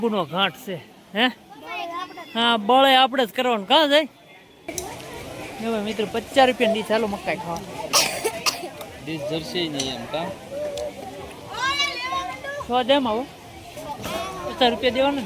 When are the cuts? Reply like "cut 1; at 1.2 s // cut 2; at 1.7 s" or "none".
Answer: cut 1; at 4.7 s